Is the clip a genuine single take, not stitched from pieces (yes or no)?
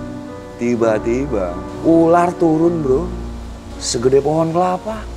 no